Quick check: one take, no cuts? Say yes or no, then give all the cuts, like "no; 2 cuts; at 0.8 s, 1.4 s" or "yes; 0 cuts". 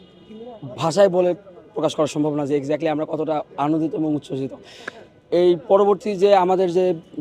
yes; 0 cuts